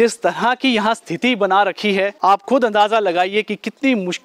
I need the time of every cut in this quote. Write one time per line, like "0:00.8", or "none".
0:02.1